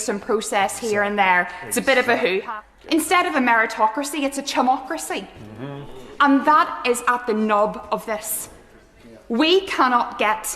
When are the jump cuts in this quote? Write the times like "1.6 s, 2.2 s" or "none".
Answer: 2.4 s